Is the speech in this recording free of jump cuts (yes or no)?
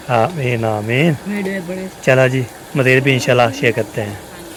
yes